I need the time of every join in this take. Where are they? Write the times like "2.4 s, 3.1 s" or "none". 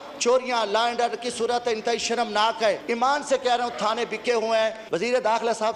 2.8 s, 4.8 s